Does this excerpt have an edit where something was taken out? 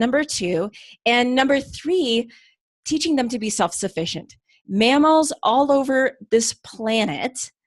no; 0 cuts

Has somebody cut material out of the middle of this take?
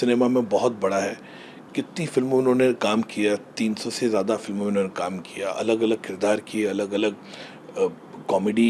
no; 0 cuts

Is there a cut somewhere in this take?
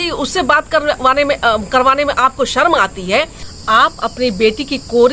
yes; 1 cut; at 3.4 s

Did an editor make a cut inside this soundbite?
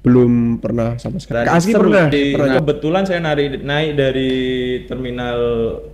yes; 2 cuts; at 1.3 s, 2.3 s

